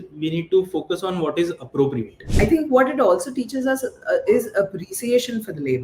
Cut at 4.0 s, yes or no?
no